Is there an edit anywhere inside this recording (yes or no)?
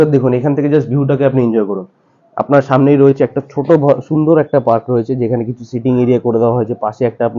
no